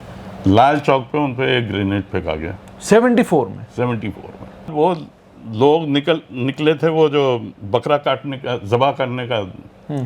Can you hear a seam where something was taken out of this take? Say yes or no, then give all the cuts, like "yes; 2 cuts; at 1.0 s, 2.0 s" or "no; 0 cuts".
yes; 1 cut; at 4.7 s